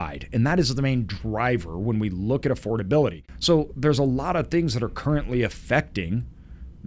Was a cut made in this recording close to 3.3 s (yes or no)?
yes